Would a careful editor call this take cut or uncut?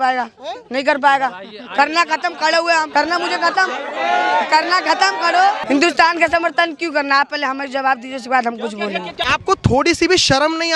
cut